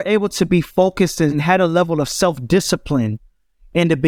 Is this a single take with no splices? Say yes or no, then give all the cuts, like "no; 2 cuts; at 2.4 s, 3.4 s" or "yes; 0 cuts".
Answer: no; 1 cut; at 1.4 s